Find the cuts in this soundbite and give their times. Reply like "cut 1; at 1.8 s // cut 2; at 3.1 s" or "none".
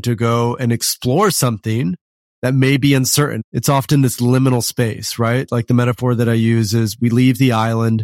cut 1; at 3.4 s